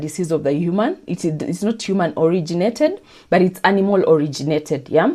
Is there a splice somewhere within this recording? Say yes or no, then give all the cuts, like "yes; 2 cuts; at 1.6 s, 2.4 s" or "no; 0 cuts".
no; 0 cuts